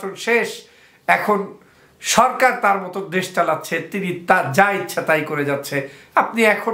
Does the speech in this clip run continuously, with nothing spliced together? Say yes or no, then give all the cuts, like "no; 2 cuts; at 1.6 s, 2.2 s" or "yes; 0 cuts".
yes; 0 cuts